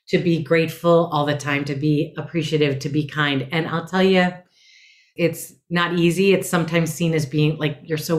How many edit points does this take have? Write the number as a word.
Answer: one